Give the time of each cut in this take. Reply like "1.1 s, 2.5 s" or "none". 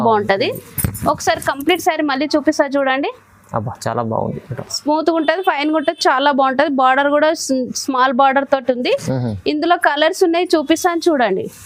none